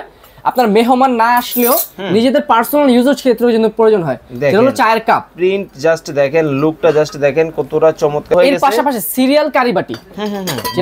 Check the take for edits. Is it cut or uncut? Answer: cut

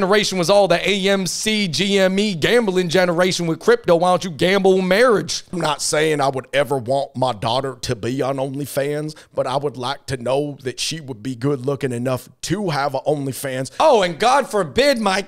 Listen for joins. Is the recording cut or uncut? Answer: cut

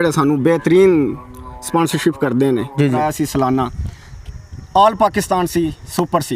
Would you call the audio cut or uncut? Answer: cut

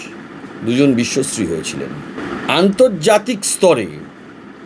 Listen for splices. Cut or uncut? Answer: cut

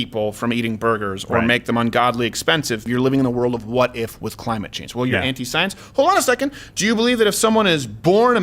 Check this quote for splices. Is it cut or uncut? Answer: cut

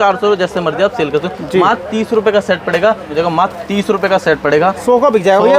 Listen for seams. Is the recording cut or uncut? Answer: cut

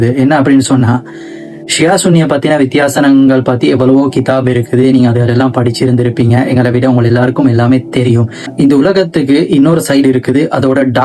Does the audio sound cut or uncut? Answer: uncut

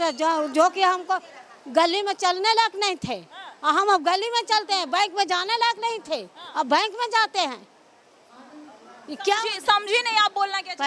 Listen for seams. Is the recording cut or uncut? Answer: uncut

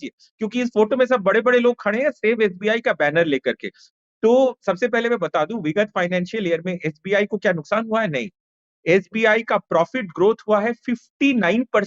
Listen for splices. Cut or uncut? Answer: uncut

